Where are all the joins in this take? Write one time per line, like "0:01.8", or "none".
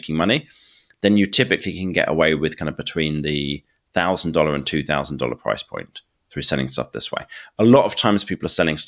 none